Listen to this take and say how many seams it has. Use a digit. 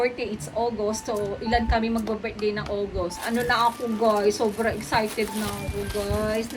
1